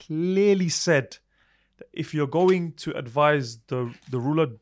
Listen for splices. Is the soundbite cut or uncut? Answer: uncut